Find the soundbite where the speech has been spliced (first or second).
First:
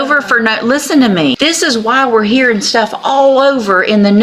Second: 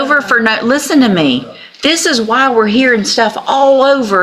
first